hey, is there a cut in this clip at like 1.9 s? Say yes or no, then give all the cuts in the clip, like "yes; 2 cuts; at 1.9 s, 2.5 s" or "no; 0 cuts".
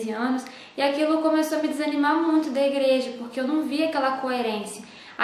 yes; 1 cut; at 1.9 s